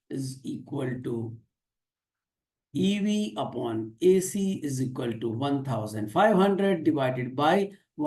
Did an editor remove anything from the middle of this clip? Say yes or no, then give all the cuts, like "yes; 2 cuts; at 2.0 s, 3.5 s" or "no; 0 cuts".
no; 0 cuts